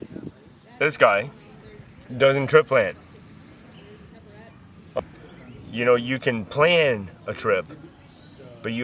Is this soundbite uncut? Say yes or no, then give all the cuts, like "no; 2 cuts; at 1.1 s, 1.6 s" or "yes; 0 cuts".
no; 1 cut; at 4.9 s